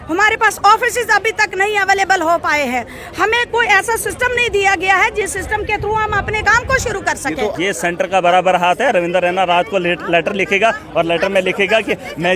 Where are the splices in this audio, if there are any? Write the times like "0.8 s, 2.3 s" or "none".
7.5 s

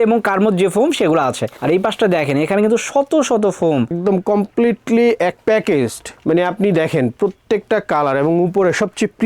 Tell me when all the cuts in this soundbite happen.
3.9 s

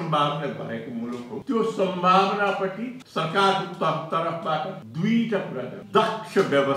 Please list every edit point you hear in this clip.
1.3 s, 3.0 s, 4.8 s, 5.8 s

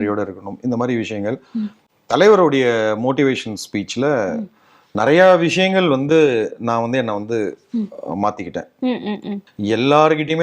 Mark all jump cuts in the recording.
9.4 s

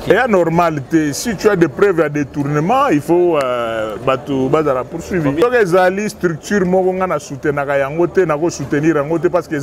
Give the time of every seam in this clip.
5.4 s

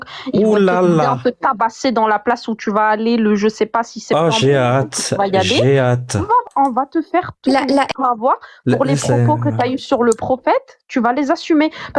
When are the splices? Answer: 6.4 s

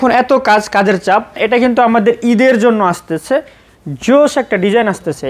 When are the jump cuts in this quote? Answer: 1.4 s

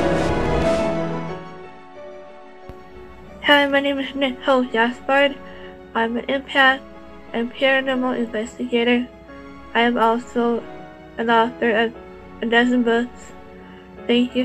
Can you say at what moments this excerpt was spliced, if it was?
10.3 s

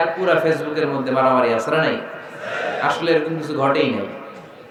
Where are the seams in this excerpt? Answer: none

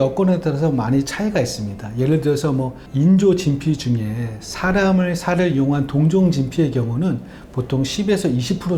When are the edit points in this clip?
none

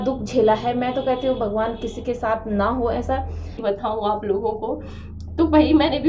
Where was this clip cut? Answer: 3.6 s

